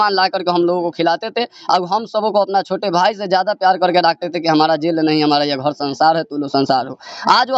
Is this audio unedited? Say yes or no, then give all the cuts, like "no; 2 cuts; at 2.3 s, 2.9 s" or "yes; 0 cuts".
yes; 0 cuts